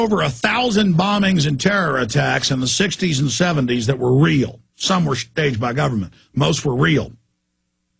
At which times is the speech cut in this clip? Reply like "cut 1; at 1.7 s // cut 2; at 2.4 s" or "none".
cut 1; at 2.6 s